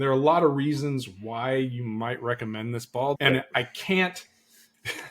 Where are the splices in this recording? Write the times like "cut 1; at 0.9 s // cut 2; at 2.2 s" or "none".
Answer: cut 1; at 3.2 s